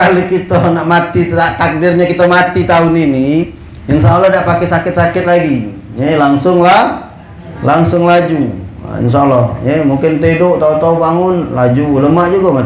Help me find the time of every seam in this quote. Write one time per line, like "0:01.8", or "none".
none